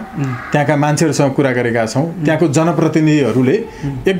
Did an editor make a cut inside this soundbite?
no; 0 cuts

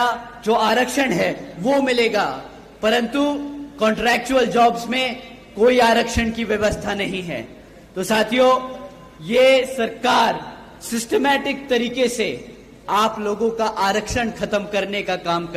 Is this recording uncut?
yes; 0 cuts

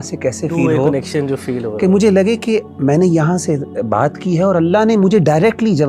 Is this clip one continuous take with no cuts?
yes; 0 cuts

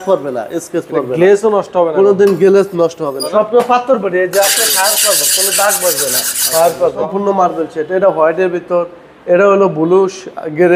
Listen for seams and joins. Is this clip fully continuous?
no; 2 cuts; at 3.2 s, 7.1 s

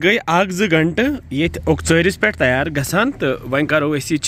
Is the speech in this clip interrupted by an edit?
no; 0 cuts

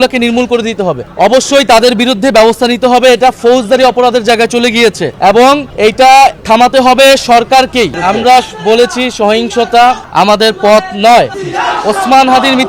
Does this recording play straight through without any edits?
no; 7 cuts; at 1.1 s, 5.1 s, 5.7 s, 6.4 s, 8.0 s, 10.0 s, 11.4 s

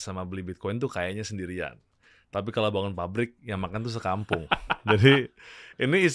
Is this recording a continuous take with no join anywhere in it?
yes; 0 cuts

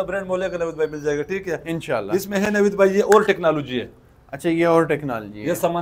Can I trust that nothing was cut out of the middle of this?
yes; 0 cuts

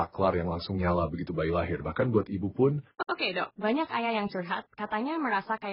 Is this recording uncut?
no; 1 cut; at 2.9 s

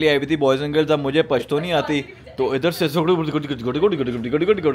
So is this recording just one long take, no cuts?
yes; 0 cuts

